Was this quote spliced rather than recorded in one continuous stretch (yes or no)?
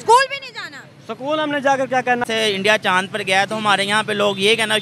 yes